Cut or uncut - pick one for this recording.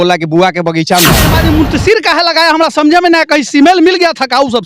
cut